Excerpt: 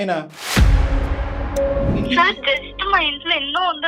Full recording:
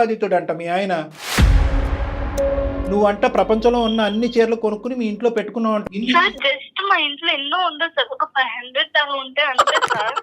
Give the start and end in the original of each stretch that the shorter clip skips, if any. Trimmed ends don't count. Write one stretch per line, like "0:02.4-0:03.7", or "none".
0:02.8-0:06.0